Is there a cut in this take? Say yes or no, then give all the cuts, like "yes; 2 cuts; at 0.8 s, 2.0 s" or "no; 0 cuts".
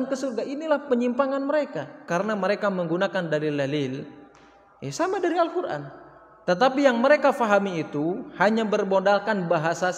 yes; 1 cut; at 2.0 s